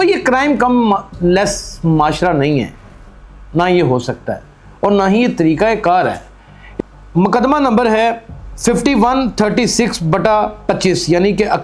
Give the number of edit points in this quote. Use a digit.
1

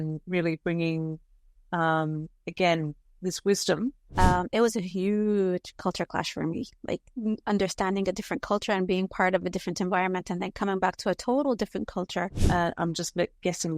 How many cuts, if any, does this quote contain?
2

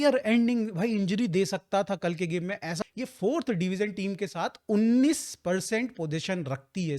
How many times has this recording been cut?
1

